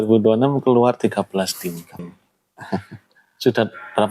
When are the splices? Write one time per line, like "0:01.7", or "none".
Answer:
0:02.1